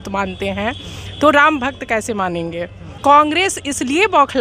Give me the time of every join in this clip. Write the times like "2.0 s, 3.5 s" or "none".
2.8 s